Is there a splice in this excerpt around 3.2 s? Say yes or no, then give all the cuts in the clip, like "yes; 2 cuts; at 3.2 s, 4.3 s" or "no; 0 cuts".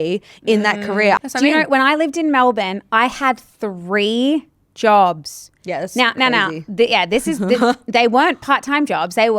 no; 1 cut; at 1.2 s